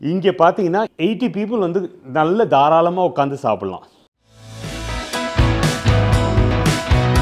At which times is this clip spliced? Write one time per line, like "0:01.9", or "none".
0:00.9
0:06.5